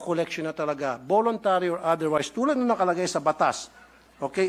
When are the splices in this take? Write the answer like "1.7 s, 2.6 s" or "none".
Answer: none